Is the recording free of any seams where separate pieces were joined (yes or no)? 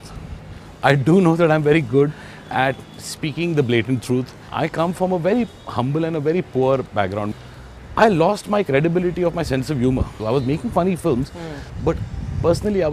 no